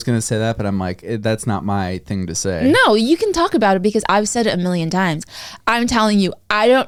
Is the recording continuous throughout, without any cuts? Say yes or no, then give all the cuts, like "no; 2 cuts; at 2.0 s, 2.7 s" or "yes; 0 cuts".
yes; 0 cuts